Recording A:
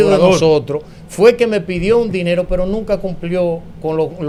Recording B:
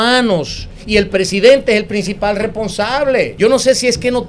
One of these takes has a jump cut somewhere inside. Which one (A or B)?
B